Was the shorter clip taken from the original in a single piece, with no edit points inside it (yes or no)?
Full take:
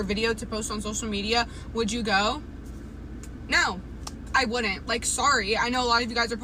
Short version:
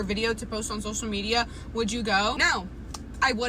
no